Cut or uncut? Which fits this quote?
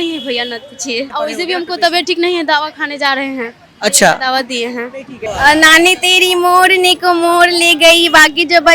cut